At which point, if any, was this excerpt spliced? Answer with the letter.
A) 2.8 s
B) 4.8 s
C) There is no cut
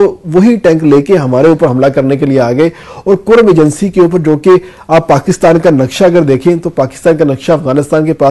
C